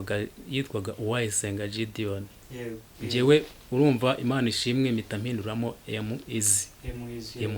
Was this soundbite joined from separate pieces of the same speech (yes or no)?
yes